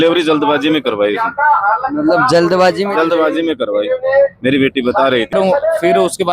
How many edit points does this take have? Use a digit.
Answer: 1